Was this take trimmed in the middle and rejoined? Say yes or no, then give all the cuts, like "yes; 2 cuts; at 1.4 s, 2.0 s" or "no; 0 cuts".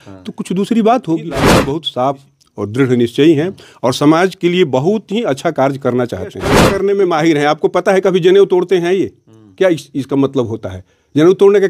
yes; 2 cuts; at 1.8 s, 6.7 s